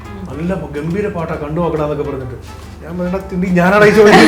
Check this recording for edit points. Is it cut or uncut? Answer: uncut